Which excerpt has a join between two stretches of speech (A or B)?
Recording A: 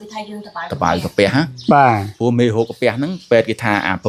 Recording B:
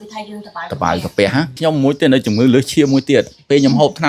B